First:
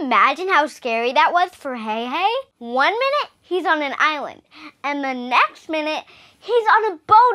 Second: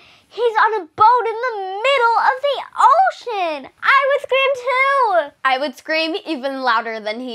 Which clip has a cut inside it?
first; 1 cut; at 2.5 s

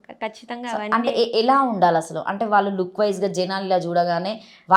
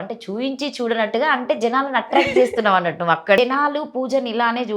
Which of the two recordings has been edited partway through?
second; 1 cut; at 3.4 s

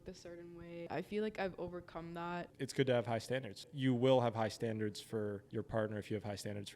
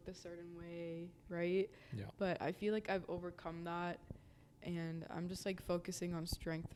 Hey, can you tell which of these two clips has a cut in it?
first; 4 cuts; at 0.9 s, 2.5 s, 3.7 s, 5.4 s

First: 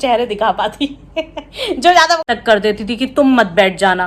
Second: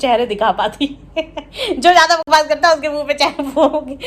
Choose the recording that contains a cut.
first; 1 cut; at 2.3 s

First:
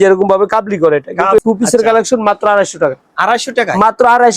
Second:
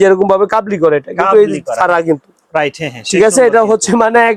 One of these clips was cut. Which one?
first; 1 cut; at 1.4 s

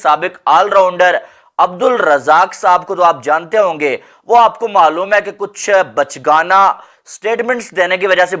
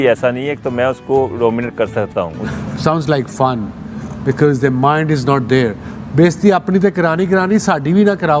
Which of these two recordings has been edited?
second; 1 cut; at 2.5 s

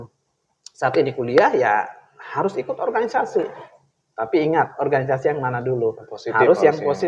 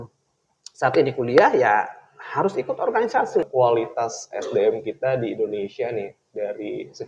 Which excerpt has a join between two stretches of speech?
second; 1 cut; at 3.5 s

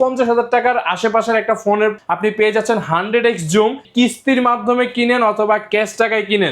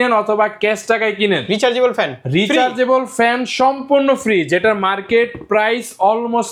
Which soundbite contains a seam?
first; 2 cuts; at 2.0 s, 3.9 s

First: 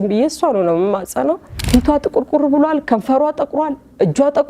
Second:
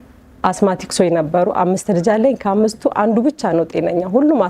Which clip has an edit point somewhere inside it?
first; 1 cut; at 1.6 s

